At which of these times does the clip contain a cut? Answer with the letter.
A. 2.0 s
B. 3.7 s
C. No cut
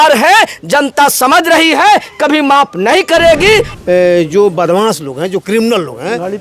B